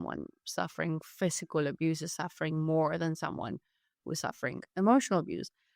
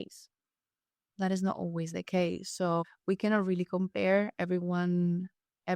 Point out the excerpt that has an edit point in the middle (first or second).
second